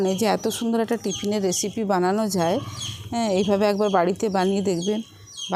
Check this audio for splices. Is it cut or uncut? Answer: uncut